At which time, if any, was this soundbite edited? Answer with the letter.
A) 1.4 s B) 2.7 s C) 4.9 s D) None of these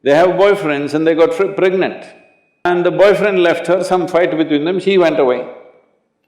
B